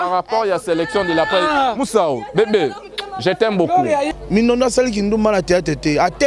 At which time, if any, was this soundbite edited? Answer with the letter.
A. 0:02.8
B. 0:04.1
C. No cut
B